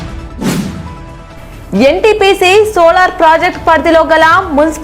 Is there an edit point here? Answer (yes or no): yes